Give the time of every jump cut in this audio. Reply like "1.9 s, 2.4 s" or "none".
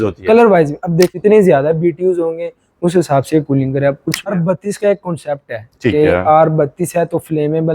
1.2 s, 4.3 s